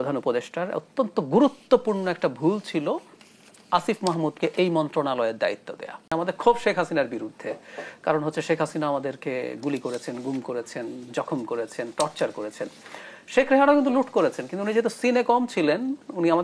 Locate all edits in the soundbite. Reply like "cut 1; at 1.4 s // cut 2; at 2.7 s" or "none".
cut 1; at 6.1 s